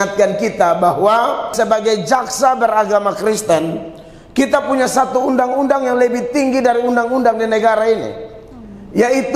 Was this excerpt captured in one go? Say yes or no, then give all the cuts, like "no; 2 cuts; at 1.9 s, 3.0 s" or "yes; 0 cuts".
no; 1 cut; at 1.5 s